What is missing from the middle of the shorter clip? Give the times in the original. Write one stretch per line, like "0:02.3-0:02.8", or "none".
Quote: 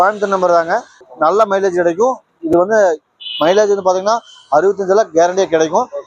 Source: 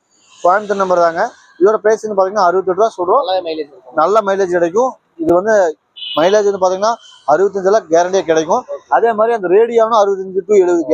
0:01.4-0:03.7